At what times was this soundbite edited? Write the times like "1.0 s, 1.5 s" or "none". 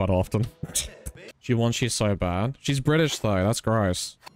1.3 s

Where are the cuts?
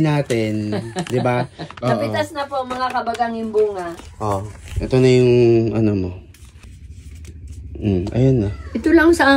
1.7 s, 3.9 s, 6.7 s

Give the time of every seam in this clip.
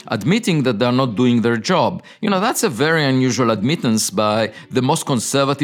none

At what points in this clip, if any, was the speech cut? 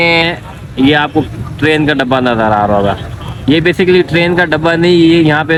none

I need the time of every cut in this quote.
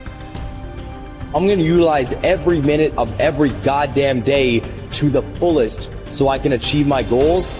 1.3 s

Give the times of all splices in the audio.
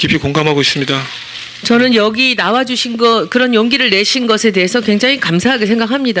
1.9 s

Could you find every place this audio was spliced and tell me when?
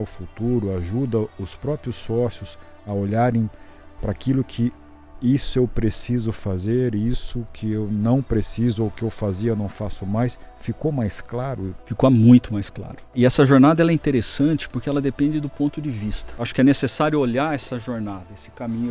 11.8 s, 13.1 s, 16.4 s

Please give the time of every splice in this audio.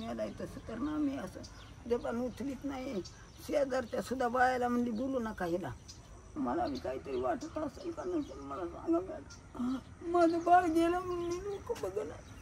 6.4 s

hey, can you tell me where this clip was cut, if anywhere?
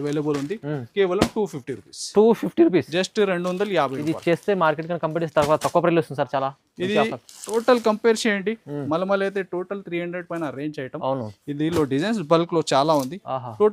none

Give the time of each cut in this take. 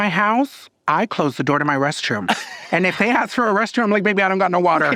none

